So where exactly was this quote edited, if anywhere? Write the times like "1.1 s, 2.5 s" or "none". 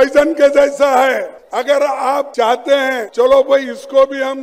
1.4 s, 2.3 s, 3.0 s